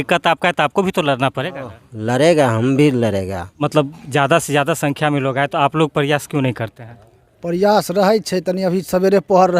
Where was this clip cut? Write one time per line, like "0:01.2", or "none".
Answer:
0:03.5